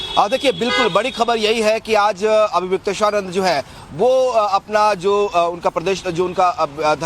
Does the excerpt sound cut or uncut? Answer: cut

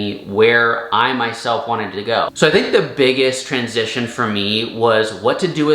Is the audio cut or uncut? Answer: cut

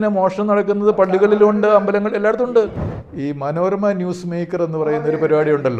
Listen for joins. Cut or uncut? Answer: cut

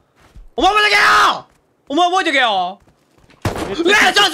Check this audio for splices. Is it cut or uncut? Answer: uncut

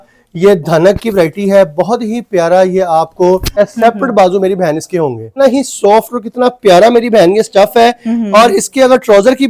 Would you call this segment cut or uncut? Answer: cut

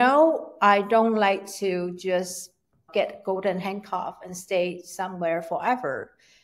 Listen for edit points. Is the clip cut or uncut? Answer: cut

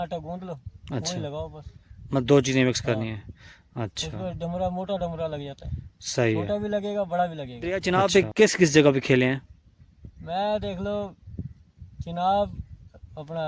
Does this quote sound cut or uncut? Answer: cut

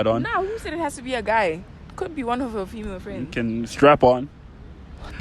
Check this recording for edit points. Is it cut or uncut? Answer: uncut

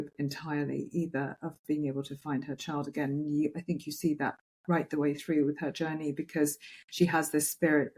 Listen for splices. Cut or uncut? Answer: uncut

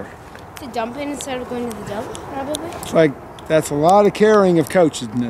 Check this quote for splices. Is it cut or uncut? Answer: uncut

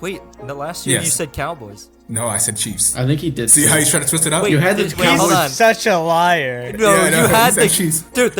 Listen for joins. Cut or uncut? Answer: uncut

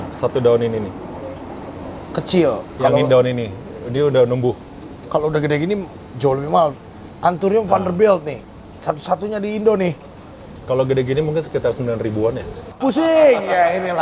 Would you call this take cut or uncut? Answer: cut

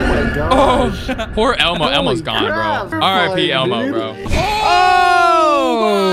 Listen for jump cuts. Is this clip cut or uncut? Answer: cut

